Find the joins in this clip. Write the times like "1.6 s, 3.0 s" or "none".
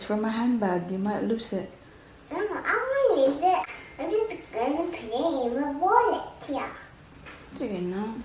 3.6 s